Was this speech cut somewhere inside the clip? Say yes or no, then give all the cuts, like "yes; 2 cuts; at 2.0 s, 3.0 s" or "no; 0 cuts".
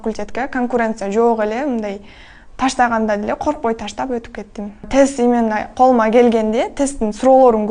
yes; 1 cut; at 4.8 s